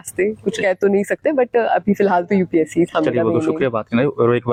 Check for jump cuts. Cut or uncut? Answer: uncut